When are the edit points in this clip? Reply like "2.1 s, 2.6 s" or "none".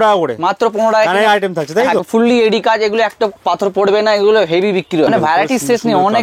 2.0 s, 5.1 s